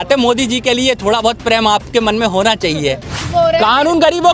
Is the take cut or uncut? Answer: cut